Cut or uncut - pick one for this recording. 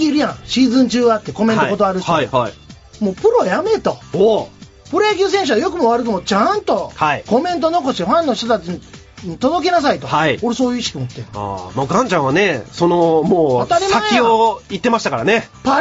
cut